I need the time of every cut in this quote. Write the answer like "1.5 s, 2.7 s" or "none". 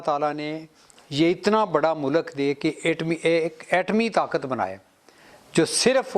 none